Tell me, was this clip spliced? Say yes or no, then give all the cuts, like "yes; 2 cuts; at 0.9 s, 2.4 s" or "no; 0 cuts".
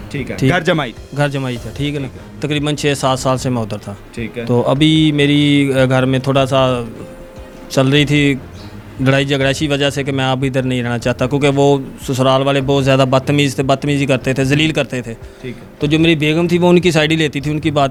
no; 0 cuts